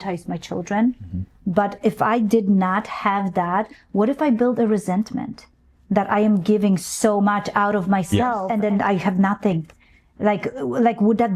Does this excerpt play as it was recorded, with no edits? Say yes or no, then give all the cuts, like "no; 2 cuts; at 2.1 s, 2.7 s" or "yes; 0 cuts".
no; 1 cut; at 8.4 s